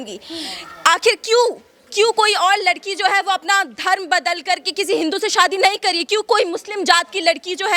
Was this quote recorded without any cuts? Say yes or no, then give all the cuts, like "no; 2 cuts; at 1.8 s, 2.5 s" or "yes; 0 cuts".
yes; 0 cuts